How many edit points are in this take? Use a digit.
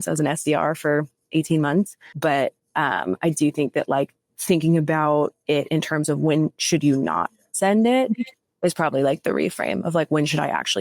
1